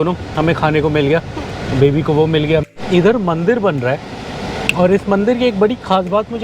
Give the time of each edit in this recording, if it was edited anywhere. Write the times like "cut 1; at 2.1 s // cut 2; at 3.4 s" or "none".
cut 1; at 2.7 s